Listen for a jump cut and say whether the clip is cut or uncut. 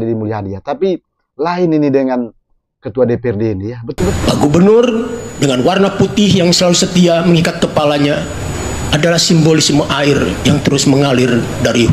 cut